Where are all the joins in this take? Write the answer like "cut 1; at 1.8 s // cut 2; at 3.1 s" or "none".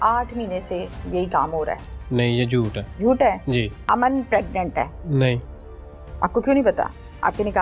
cut 1; at 2.8 s // cut 2; at 3.8 s // cut 3; at 5.0 s